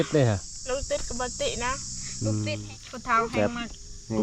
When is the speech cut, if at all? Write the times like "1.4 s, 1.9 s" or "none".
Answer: 2.5 s